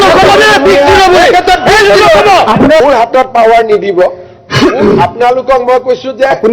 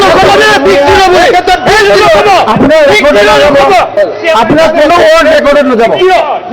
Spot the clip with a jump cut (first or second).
first